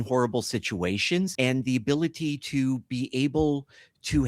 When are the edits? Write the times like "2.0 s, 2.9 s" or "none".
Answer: 1.3 s